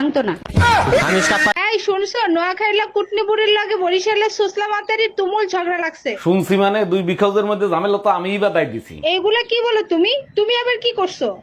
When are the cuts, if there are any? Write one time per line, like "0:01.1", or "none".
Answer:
0:01.3